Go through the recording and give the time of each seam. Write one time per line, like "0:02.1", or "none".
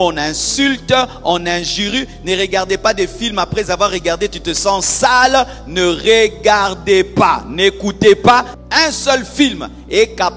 0:08.6